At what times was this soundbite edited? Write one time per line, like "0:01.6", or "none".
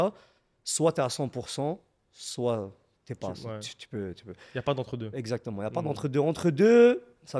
none

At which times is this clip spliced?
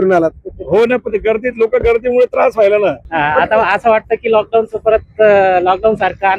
0:03.1

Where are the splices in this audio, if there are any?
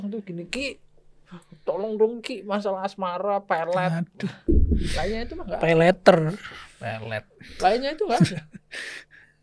none

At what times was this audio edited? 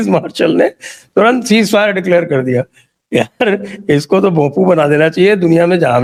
none

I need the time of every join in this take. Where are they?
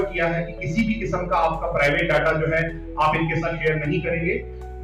none

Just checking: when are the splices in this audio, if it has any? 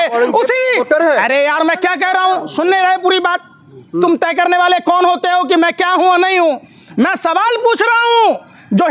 none

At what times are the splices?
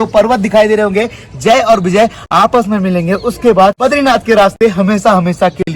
0:03.8

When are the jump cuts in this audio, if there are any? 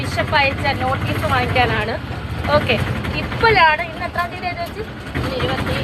none

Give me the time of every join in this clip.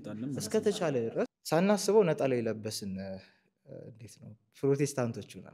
0:01.4

